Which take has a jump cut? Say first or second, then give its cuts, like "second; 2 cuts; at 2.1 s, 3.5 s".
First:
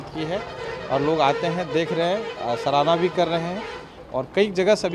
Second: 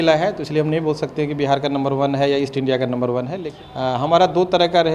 second; 1 cut; at 3.4 s